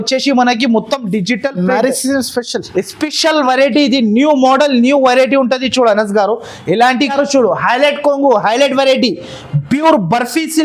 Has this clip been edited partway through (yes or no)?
yes